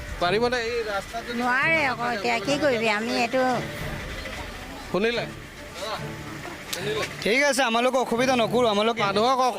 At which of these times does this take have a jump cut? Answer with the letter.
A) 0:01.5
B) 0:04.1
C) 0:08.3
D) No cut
B